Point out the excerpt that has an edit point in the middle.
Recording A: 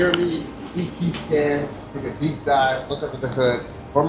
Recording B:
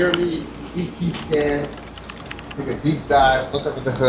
A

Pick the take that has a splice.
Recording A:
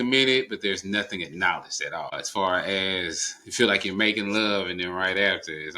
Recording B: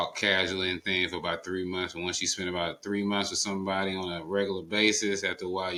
A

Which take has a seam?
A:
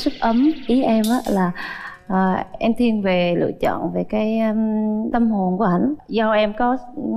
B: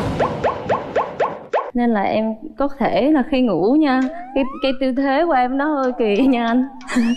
A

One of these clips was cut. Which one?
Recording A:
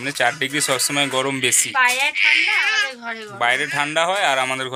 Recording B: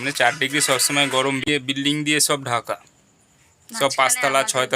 B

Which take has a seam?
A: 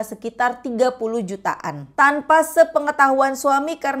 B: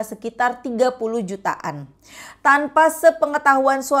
A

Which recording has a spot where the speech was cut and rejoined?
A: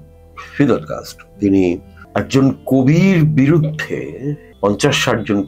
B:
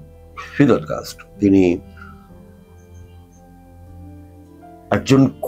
A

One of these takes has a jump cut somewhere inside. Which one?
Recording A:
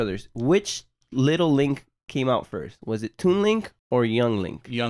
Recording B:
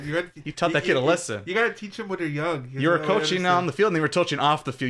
A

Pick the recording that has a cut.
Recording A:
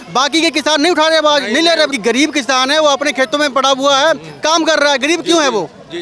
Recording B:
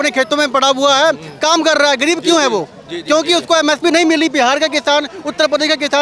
A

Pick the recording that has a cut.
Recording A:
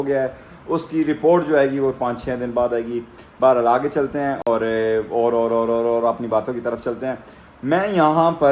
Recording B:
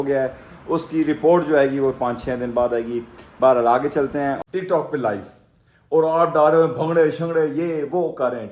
B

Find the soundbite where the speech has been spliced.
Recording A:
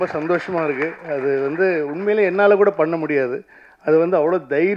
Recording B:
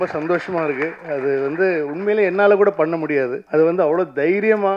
B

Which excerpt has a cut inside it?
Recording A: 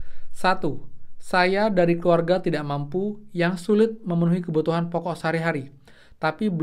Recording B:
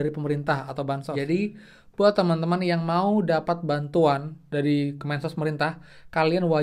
B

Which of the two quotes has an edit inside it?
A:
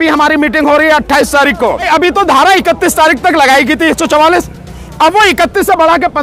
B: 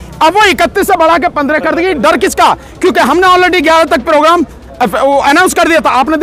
A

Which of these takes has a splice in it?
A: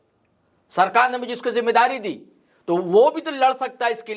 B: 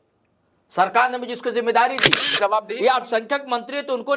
B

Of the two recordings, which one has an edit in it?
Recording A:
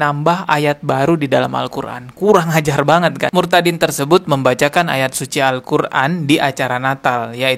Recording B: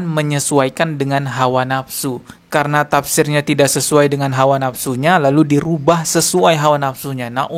A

